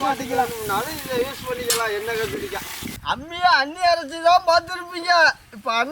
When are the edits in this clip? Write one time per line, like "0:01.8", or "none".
0:02.9